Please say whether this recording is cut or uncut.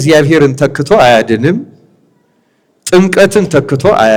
uncut